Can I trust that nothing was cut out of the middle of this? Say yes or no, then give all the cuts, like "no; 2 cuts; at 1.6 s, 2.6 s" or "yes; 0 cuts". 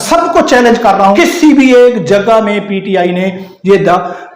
no; 1 cut; at 1.2 s